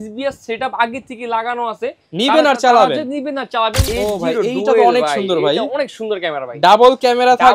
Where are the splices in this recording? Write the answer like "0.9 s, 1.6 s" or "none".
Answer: 3.8 s

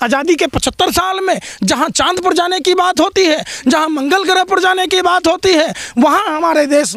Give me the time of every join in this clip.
none

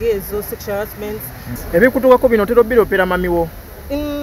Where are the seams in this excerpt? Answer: 1.5 s

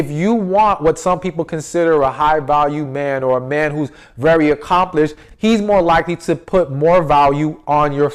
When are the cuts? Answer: none

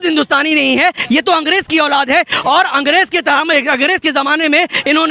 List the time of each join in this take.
none

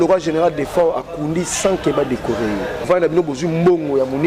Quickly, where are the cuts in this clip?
2.9 s

